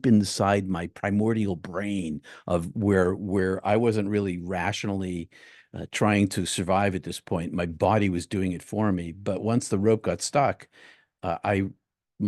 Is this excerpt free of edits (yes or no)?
yes